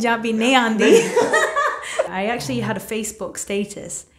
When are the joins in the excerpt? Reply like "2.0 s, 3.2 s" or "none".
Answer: 2.1 s

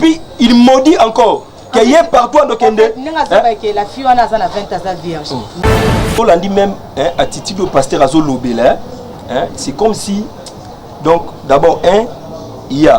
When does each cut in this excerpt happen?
5.6 s

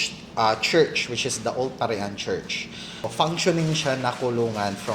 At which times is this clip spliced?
3.1 s

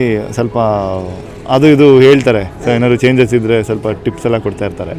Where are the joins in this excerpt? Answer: none

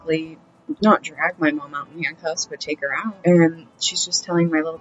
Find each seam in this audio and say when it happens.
3.2 s

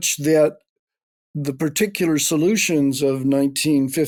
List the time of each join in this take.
none

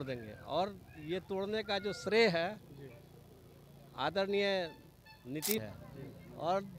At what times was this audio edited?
5.6 s

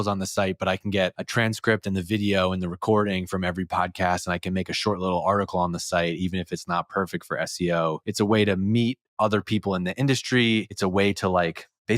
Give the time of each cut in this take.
1.2 s, 8.0 s, 10.7 s

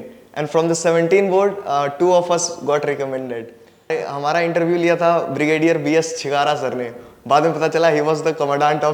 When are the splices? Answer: 3.9 s

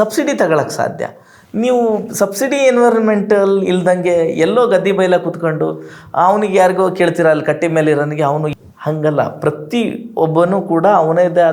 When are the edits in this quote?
8.5 s

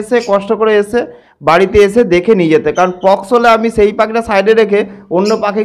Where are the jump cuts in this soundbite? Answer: none

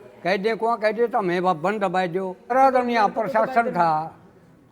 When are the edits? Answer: 2.5 s

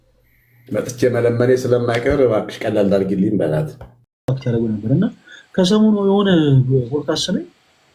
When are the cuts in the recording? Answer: 4.3 s

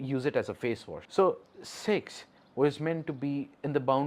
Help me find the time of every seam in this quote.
1.0 s

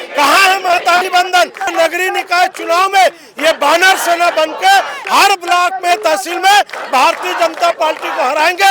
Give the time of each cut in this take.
1.7 s

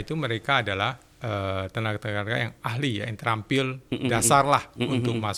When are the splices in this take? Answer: none

